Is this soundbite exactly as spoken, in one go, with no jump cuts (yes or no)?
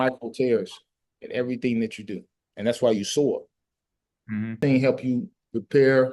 no